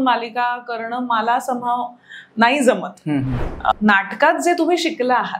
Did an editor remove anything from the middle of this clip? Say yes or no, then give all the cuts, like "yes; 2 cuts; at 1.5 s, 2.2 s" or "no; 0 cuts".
yes; 1 cut; at 3.7 s